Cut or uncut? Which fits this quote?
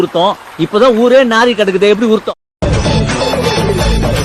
uncut